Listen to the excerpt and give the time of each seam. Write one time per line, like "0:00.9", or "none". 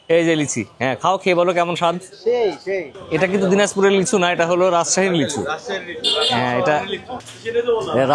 0:02.9
0:07.2